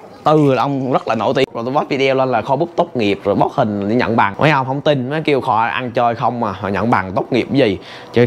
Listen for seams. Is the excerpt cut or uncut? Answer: cut